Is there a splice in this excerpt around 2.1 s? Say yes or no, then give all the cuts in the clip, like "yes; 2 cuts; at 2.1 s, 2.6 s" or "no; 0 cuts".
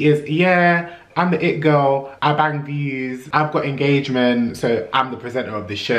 yes; 2 cuts; at 2.1 s, 3.2 s